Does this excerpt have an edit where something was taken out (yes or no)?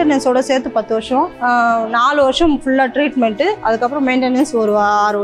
yes